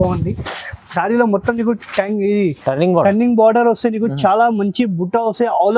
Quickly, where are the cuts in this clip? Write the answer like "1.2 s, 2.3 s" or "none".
none

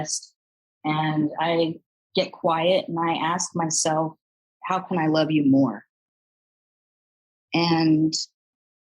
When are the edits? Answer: none

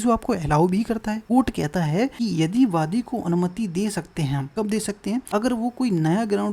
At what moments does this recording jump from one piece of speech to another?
1.2 s, 2.1 s, 4.5 s, 5.3 s

